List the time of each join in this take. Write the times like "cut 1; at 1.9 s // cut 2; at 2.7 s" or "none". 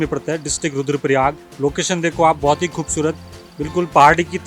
cut 1; at 1.5 s